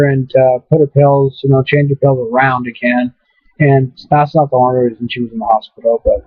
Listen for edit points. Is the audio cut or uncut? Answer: uncut